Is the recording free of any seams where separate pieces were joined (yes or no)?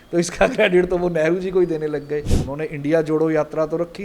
no